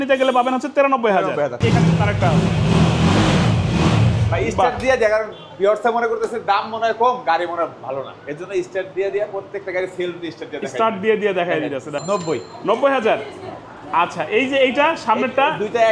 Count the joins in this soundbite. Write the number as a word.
two